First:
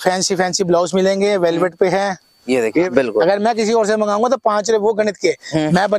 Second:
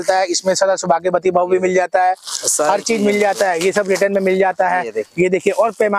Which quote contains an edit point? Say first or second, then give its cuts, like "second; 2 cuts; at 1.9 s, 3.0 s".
first; 1 cut; at 2.9 s